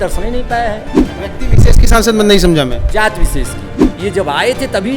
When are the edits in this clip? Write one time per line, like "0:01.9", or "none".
0:01.1
0:03.8